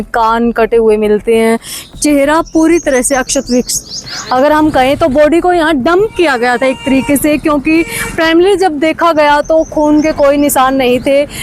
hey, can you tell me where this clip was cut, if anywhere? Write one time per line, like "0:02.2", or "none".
none